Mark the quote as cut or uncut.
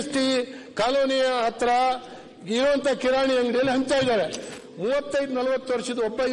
cut